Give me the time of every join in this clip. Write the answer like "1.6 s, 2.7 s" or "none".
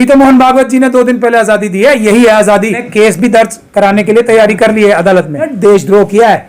2.9 s, 5.5 s